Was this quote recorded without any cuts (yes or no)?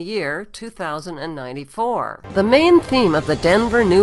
no